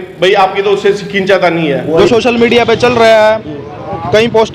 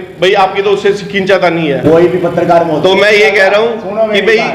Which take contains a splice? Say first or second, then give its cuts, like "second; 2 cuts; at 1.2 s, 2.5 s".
first; 1 cut; at 1.8 s